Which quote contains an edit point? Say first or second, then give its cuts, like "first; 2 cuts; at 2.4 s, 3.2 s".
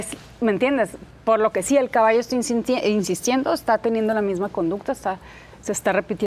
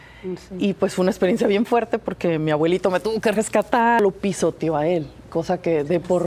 second; 1 cut; at 4.0 s